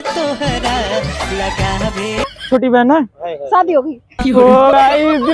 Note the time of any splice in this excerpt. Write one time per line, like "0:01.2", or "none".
0:02.3